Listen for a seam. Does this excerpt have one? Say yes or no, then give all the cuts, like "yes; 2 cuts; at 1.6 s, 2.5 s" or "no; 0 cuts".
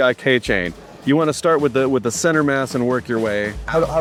no; 0 cuts